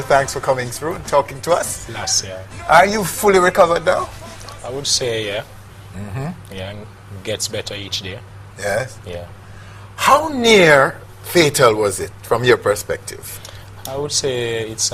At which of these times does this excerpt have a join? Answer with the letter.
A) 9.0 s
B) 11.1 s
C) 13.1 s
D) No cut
A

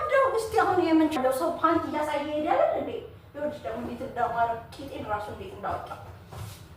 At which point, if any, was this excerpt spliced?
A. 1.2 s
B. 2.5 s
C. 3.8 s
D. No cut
A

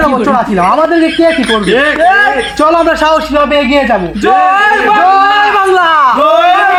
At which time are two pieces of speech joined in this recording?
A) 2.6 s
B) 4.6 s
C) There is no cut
C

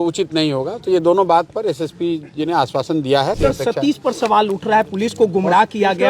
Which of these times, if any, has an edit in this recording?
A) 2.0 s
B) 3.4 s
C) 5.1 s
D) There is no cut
B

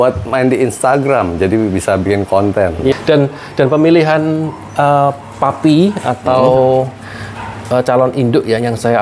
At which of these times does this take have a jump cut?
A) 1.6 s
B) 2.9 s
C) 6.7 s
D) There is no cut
B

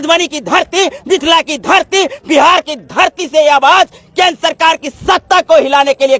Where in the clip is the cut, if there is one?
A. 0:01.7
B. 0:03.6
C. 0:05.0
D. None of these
D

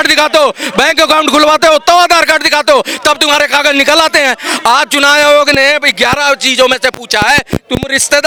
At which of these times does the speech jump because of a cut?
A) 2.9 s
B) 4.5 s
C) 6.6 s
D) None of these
D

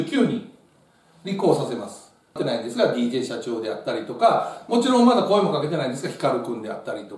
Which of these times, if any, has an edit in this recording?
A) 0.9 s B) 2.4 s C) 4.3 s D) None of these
B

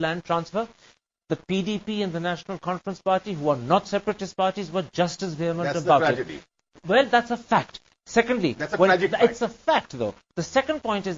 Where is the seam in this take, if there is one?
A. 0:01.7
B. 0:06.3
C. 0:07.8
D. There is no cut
B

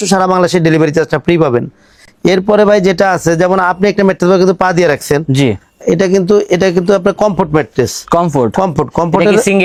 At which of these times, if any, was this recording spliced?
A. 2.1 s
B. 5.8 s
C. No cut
C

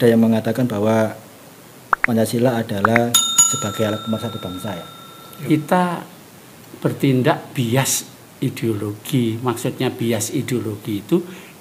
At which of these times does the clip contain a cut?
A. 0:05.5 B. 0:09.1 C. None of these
A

